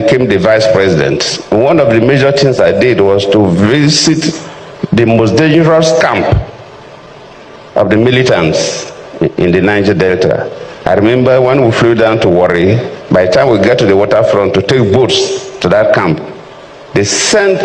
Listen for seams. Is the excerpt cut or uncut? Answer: uncut